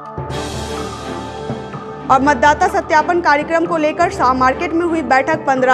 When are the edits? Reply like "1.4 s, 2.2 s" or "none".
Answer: 1.7 s